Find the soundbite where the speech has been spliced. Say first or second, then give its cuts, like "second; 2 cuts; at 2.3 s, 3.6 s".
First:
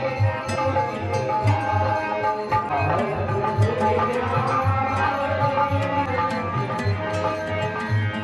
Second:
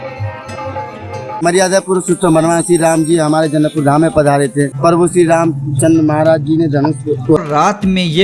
second; 3 cuts; at 1.4 s, 4.7 s, 7.4 s